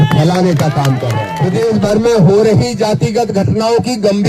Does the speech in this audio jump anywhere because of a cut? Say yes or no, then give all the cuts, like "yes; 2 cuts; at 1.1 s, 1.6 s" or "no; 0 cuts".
yes; 1 cut; at 1.2 s